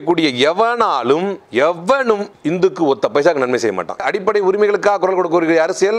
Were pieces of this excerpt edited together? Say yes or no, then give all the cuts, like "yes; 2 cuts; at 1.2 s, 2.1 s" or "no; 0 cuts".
yes; 3 cuts; at 1.4 s, 2.3 s, 4.0 s